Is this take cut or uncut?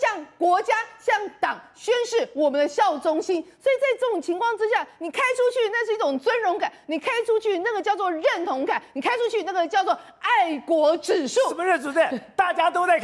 uncut